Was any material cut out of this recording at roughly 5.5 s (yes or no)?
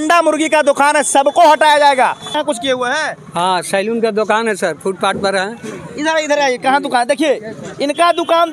no